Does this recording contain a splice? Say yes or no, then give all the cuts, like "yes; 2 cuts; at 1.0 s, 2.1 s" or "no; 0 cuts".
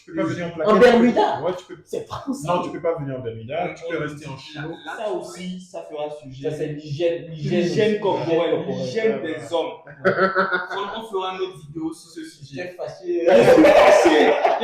yes; 2 cuts; at 1.7 s, 4.9 s